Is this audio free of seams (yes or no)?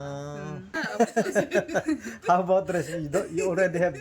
no